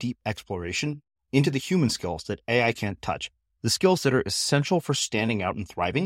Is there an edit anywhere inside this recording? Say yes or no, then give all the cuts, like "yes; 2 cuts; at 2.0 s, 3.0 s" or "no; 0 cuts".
no; 0 cuts